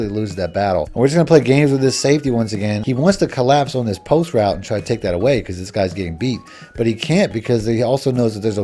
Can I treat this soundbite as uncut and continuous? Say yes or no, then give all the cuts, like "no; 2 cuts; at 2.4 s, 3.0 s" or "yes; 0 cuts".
no; 2 cuts; at 0.9 s, 2.8 s